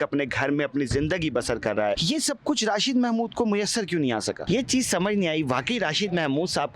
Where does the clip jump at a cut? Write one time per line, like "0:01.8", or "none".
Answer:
0:02.0
0:04.4

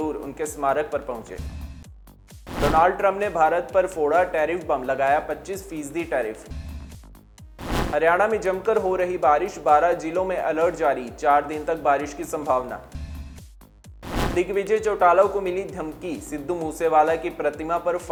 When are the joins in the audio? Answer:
none

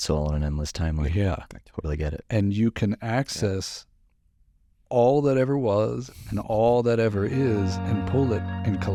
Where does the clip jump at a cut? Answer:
none

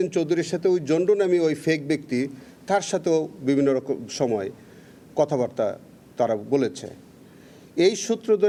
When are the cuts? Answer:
none

